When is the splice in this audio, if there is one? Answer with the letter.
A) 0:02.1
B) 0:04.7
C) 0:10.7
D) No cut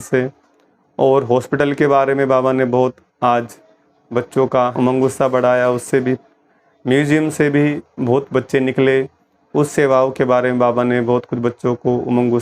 B